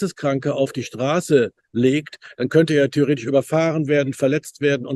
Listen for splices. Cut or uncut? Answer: uncut